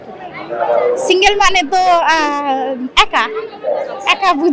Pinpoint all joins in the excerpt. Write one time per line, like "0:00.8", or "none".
none